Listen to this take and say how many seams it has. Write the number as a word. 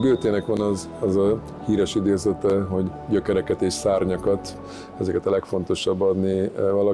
zero